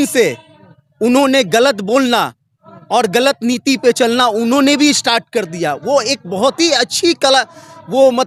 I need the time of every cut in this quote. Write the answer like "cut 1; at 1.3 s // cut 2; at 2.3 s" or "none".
none